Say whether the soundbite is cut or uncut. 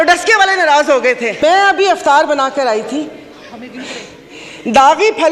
cut